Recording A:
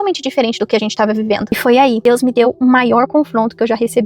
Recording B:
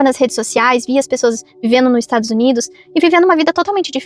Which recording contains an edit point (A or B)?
A